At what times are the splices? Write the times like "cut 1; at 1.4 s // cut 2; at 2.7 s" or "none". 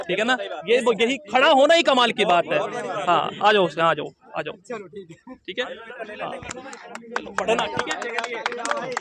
none